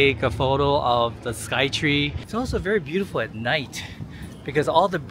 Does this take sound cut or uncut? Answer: cut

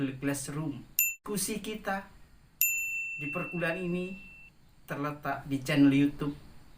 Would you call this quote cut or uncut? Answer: cut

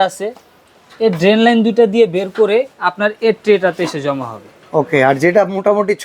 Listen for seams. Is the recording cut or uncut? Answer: uncut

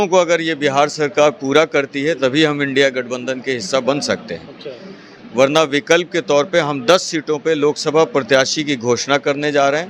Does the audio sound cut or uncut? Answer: uncut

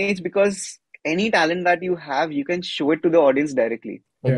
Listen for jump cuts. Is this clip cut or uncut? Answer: uncut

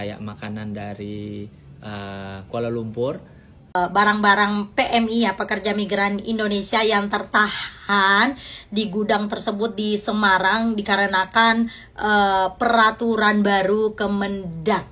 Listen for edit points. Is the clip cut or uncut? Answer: cut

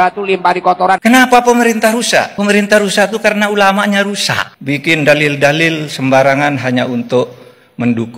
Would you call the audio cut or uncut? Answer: cut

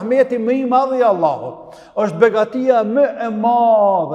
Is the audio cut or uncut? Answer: uncut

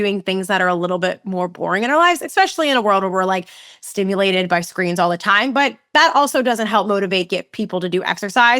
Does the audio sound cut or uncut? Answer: uncut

